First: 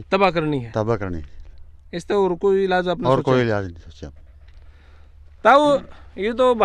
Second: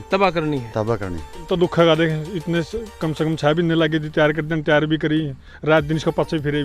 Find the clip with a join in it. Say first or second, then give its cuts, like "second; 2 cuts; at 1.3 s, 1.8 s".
second; 1 cut; at 1.4 s